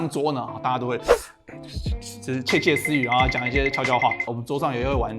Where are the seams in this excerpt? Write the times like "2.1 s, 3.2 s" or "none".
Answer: 4.2 s